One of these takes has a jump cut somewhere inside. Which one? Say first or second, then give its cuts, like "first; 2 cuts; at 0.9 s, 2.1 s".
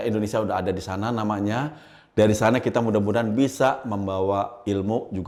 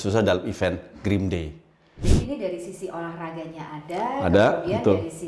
second; 1 cut; at 2.1 s